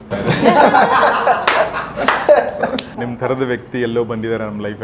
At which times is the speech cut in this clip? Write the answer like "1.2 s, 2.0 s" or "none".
3.0 s